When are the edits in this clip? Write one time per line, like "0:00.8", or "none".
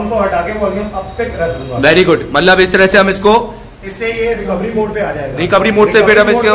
none